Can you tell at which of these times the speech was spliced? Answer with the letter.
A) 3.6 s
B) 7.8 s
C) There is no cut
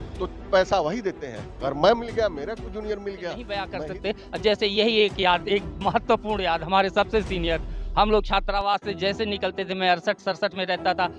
A